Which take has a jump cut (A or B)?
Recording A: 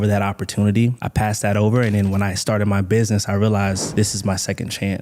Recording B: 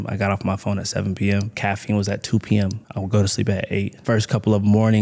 B